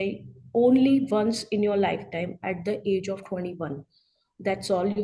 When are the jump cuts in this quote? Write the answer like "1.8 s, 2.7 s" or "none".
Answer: none